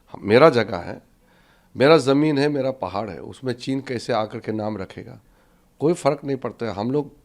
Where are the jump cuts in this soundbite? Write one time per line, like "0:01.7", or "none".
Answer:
none